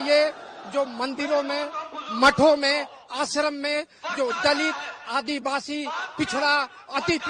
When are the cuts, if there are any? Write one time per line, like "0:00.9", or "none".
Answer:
none

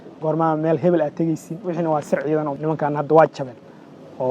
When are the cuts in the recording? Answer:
0:02.5

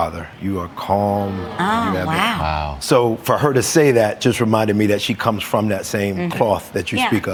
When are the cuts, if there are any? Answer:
none

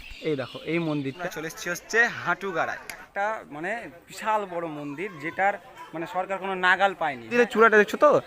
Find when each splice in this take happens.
0:01.2
0:03.1
0:07.3

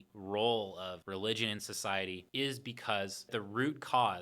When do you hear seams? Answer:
0:01.0
0:02.2
0:03.3

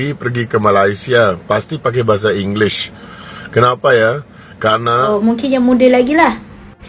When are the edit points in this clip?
0:05.1

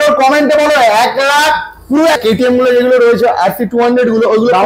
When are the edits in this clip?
0:02.2

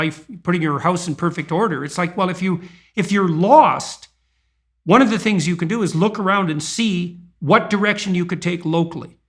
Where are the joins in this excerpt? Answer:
none

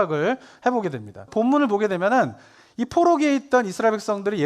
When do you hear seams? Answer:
0:01.3

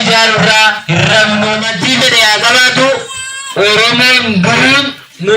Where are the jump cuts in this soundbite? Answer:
0:01.7

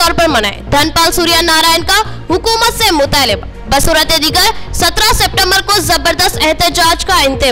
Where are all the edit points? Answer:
none

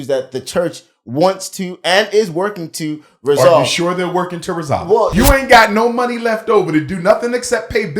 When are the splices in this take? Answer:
0:05.1

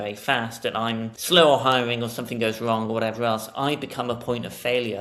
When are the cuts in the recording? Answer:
0:01.1

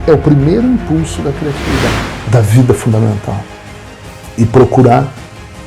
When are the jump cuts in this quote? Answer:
0:02.1

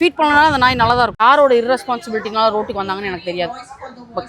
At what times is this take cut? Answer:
0:01.2

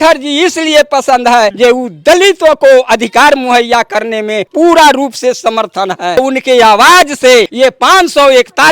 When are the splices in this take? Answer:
0:01.5
0:04.5
0:06.2
0:07.5

